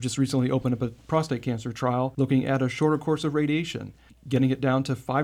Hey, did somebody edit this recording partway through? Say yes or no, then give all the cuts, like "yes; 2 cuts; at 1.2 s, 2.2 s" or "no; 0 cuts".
yes; 1 cut; at 2.1 s